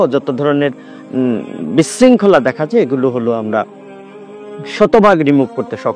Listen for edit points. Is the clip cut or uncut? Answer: uncut